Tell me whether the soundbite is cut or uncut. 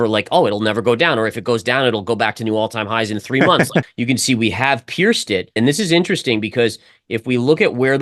cut